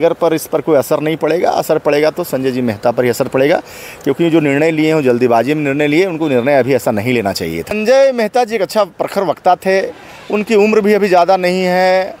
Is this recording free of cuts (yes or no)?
no